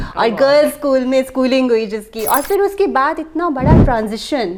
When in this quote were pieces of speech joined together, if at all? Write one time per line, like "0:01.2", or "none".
none